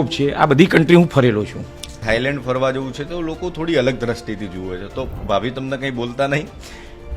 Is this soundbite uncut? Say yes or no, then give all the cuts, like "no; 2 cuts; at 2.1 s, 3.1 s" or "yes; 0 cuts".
no; 1 cut; at 2.0 s